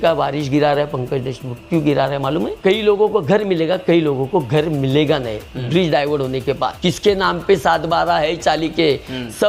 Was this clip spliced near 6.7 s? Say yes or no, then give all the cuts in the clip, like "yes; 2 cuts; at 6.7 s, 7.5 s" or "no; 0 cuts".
yes; 2 cuts; at 2.6 s, 6.7 s